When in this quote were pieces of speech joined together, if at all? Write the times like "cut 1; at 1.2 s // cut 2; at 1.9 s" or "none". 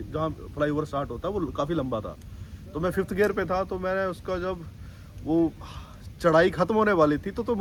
none